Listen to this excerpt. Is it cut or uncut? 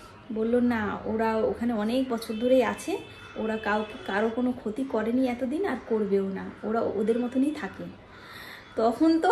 uncut